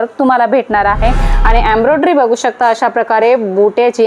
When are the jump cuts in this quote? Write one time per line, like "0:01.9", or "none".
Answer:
0:01.3